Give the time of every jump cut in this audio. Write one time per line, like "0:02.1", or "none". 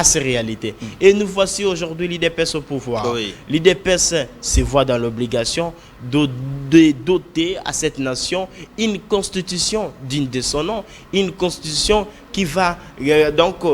none